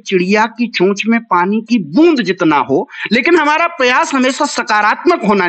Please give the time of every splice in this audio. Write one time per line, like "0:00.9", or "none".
none